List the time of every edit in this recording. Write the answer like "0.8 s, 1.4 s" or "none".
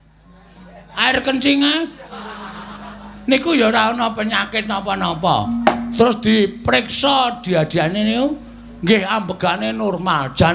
none

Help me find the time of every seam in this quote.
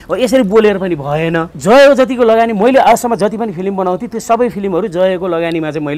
1.5 s

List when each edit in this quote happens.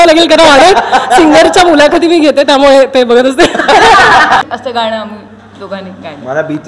4.4 s

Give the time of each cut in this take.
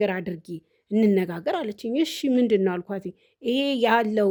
none

